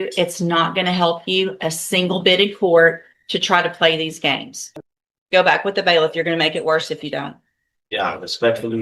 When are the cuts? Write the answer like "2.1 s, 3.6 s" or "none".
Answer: 4.6 s